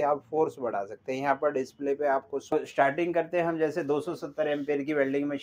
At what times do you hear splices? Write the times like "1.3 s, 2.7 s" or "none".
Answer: 2.5 s